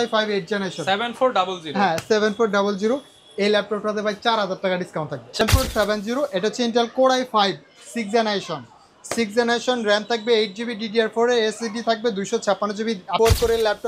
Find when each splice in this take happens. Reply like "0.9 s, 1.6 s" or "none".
5.4 s, 13.1 s

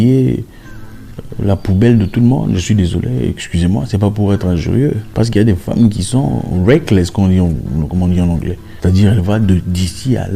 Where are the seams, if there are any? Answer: 5.0 s, 8.6 s

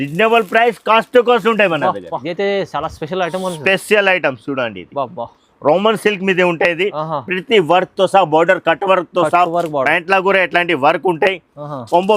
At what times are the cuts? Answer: 2.2 s

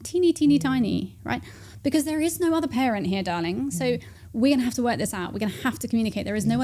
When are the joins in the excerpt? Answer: none

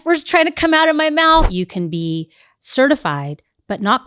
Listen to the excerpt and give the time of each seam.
1.5 s

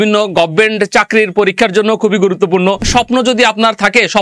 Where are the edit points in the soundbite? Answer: 2.9 s

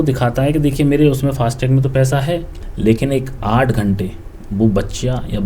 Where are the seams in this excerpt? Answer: 2.6 s

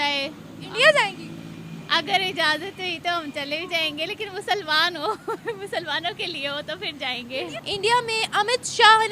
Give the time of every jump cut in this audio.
7.5 s

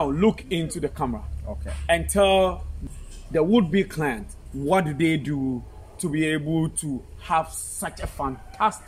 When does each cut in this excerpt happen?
2.7 s

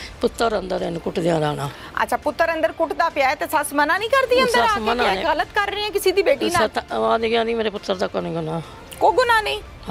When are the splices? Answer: none

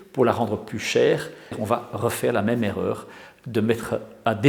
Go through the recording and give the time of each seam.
1.5 s

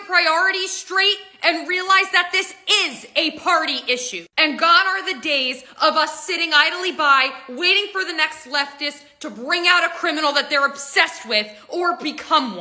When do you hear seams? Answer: none

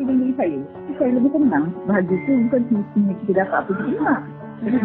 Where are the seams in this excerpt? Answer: 0.9 s, 1.8 s

